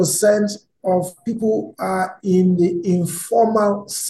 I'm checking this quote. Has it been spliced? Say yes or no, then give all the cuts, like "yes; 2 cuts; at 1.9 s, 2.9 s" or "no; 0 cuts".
yes; 1 cut; at 1.2 s